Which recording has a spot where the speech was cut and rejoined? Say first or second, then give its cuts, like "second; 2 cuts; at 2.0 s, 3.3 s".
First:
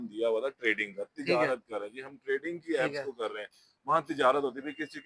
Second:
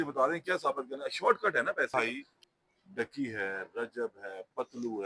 second; 1 cut; at 1.9 s